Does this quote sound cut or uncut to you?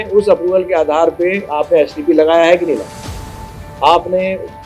uncut